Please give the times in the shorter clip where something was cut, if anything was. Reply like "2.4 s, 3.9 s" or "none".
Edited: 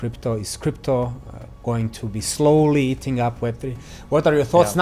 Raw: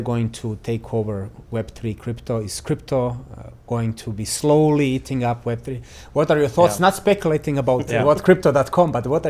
none